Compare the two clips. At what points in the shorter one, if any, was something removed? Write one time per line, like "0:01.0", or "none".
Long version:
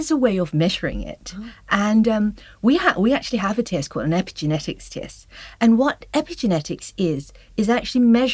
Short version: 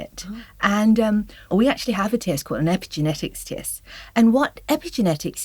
0:01.5